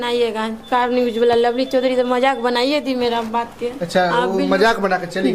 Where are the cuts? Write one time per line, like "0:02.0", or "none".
none